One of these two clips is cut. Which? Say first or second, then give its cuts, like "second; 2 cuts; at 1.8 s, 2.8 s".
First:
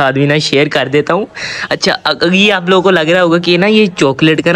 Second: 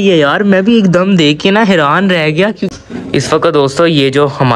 second; 1 cut; at 2.7 s